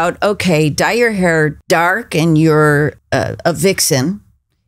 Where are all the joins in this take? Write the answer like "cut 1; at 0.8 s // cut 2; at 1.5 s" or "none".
cut 1; at 1.6 s // cut 2; at 3.0 s